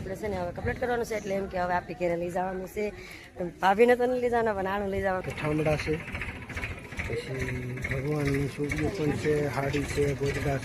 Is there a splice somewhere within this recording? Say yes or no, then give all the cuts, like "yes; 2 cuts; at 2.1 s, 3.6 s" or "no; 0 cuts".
yes; 1 cut; at 5.3 s